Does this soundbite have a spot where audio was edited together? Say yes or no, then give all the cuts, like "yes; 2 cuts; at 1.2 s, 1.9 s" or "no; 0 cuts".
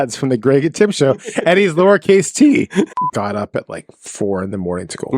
yes; 1 cut; at 2.9 s